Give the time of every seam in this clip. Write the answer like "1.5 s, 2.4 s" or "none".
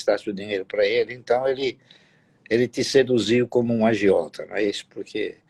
none